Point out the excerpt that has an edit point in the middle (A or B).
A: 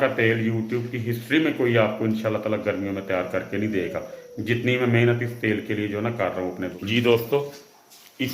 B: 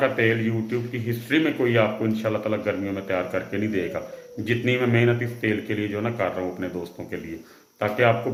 A